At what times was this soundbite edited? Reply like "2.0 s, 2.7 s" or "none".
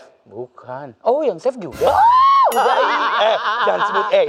none